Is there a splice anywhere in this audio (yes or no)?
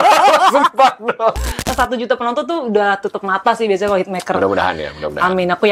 yes